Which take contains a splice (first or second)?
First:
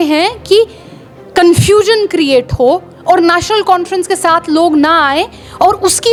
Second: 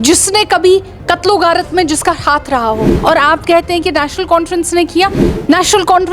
second